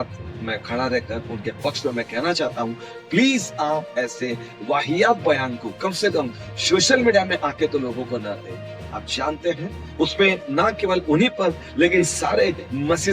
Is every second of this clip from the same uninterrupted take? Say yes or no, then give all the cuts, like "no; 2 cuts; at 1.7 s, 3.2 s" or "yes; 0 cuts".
yes; 0 cuts